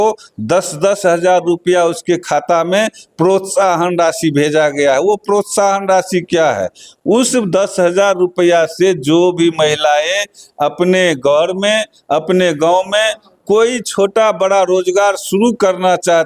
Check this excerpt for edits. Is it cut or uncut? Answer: uncut